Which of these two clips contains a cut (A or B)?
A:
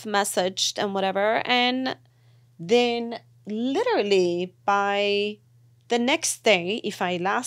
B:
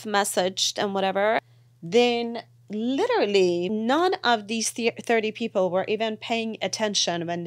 B